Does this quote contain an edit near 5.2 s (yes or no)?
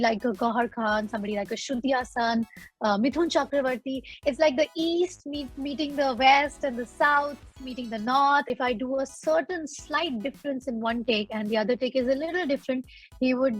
no